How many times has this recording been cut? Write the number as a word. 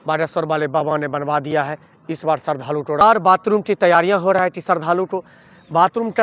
one